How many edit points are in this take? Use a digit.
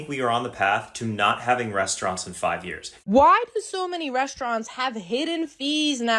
1